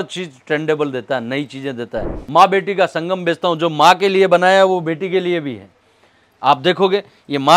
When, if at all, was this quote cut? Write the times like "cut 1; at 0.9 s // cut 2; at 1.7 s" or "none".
cut 1; at 2.2 s